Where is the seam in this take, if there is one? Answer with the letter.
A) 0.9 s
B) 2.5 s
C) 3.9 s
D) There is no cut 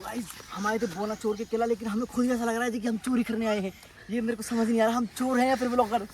C